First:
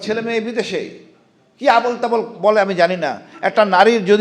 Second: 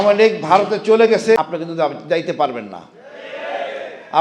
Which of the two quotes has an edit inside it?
second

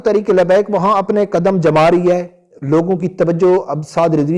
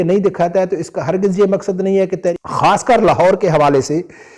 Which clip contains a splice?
second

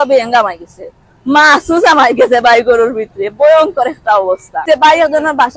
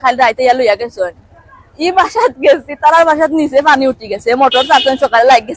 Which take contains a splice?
first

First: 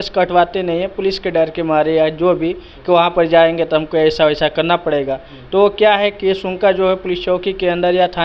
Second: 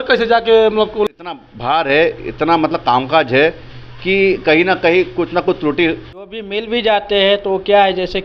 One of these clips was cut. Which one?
second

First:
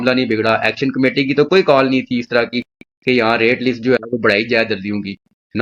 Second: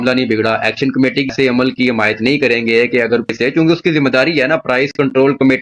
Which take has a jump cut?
second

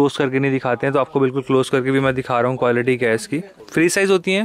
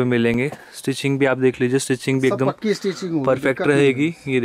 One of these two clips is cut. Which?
first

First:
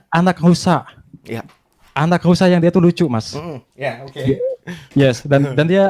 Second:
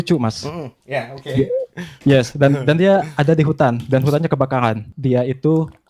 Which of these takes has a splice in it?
second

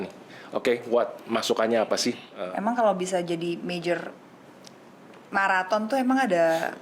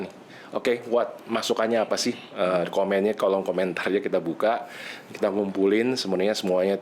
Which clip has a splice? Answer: first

